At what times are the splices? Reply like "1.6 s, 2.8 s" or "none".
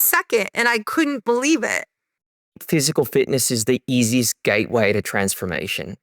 2.5 s